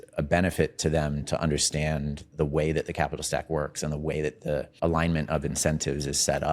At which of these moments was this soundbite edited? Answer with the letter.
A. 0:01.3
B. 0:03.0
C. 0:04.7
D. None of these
C